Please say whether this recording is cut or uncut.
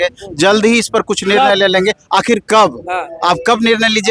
uncut